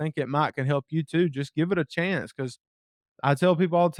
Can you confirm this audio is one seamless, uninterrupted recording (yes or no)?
yes